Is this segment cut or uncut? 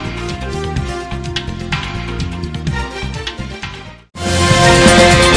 uncut